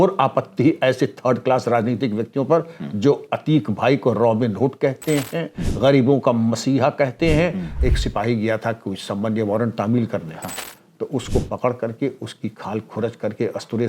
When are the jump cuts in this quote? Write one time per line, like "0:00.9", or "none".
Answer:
0:07.7

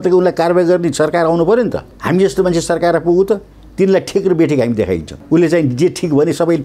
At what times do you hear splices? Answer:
0:01.9
0:05.1

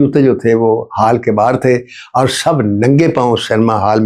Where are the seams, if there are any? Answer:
none

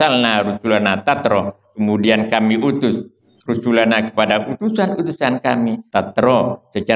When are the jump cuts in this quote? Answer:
0:05.8

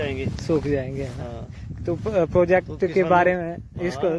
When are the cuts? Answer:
none

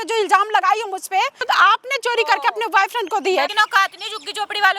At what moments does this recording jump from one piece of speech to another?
0:01.4
0:03.5

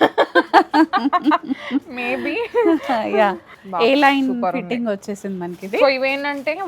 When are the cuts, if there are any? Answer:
0:03.6

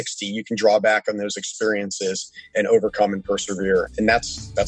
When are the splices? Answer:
0:02.5
0:03.9

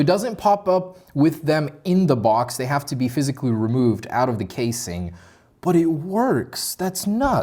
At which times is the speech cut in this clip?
none

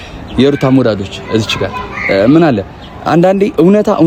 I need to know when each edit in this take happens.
none

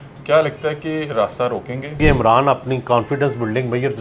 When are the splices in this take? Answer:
0:02.0

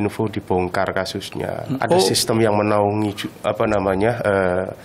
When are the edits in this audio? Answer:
0:01.7

